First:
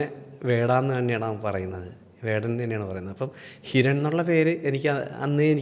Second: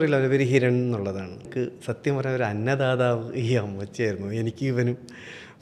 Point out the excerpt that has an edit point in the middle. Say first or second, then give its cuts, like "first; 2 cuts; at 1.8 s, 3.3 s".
second; 1 cut; at 1.5 s